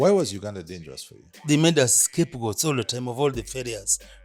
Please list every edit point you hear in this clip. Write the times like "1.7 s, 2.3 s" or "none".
1.4 s